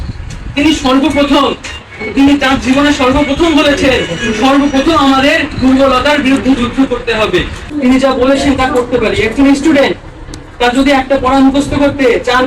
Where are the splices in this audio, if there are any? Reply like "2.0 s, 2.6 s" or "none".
7.6 s